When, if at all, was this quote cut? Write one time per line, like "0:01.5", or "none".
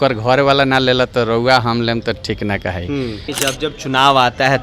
0:03.3